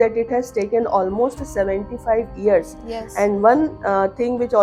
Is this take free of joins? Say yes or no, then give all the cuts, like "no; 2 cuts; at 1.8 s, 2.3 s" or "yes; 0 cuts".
yes; 0 cuts